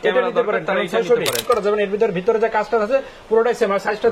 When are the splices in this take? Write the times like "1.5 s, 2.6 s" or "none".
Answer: 1.4 s